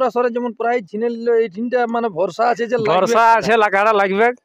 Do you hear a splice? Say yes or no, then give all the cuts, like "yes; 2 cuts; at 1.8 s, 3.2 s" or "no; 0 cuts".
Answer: no; 0 cuts